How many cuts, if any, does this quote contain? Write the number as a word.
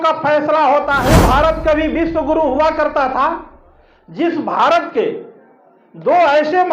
one